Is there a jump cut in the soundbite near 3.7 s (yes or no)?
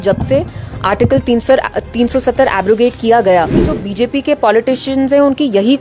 yes